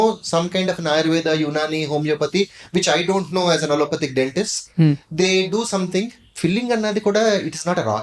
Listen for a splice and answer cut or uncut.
cut